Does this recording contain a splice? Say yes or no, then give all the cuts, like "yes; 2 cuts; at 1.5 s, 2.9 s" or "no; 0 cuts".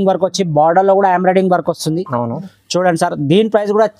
no; 0 cuts